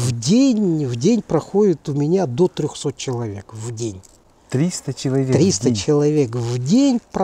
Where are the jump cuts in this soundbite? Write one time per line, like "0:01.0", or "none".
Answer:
none